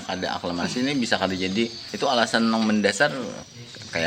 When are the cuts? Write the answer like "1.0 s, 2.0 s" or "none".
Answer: 1.8 s